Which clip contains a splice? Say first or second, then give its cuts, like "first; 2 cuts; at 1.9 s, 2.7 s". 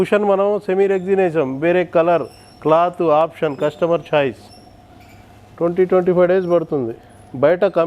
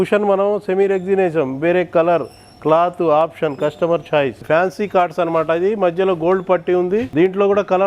second; 2 cuts; at 4.4 s, 7.1 s